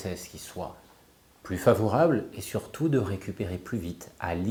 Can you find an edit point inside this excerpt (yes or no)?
no